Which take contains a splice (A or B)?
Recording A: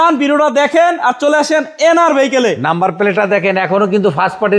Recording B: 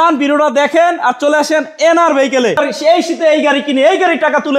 B